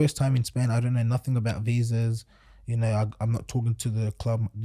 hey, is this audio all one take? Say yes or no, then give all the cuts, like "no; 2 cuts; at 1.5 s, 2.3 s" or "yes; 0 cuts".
yes; 0 cuts